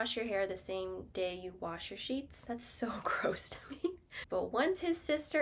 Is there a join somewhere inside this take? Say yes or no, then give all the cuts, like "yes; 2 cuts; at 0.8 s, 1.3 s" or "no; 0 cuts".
yes; 2 cuts; at 2.3 s, 4.2 s